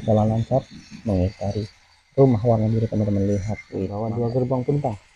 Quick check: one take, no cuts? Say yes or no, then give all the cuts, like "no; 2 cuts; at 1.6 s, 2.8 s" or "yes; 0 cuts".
no; 1 cut; at 3.9 s